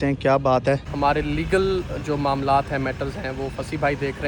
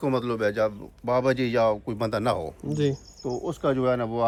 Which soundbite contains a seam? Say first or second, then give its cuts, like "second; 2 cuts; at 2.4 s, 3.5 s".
first; 1 cut; at 0.9 s